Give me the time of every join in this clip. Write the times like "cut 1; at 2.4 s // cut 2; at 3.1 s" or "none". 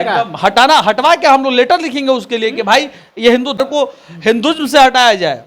cut 1; at 3.6 s